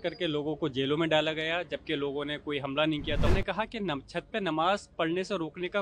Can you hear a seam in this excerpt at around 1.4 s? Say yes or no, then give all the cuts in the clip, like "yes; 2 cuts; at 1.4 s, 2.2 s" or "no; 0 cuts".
no; 1 cut; at 3.3 s